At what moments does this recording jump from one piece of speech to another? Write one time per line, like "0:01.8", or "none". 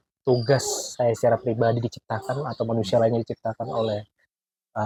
none

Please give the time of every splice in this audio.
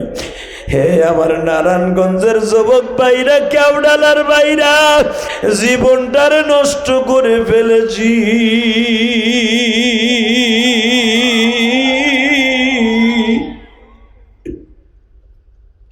0:05.3

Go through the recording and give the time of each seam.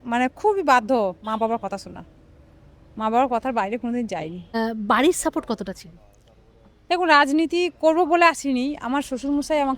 0:04.5

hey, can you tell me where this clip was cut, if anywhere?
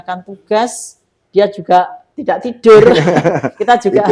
0:02.1

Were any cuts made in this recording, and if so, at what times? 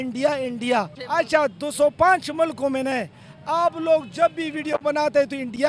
0:01.0

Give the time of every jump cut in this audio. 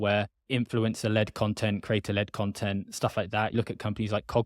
0:03.5

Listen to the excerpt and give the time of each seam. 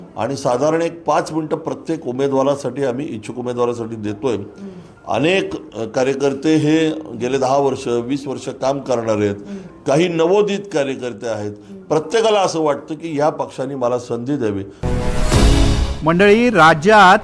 none

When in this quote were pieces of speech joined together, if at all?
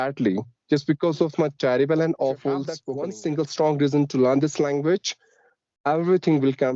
0:02.8

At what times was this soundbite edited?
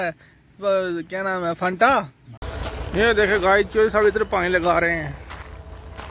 0:02.4

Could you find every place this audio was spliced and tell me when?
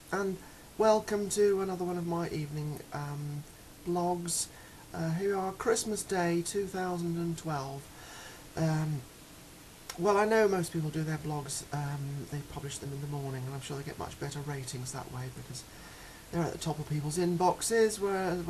none

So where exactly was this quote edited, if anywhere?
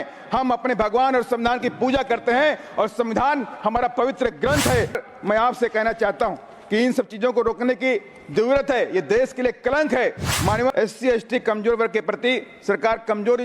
0:05.0
0:10.7

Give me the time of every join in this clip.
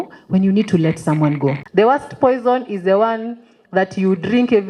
0:01.6

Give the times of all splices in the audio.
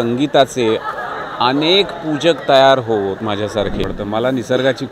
0:03.6

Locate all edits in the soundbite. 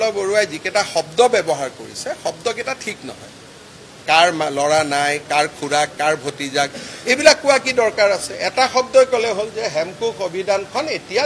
none

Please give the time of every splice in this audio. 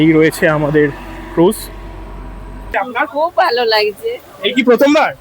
0:02.7

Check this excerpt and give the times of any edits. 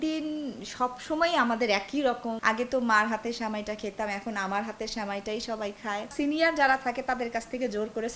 0:02.4
0:06.1

